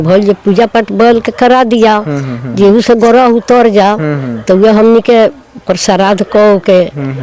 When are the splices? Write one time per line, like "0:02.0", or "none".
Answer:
none